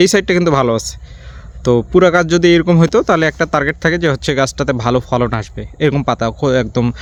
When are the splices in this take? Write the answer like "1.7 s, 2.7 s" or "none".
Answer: none